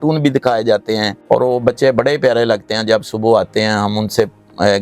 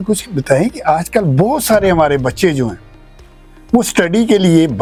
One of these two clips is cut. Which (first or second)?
first